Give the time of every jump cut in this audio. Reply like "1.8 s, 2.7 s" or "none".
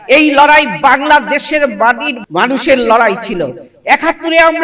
2.1 s